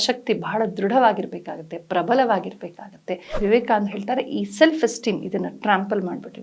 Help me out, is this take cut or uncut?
cut